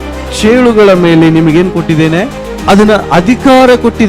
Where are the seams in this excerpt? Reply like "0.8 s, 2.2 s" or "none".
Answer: 2.5 s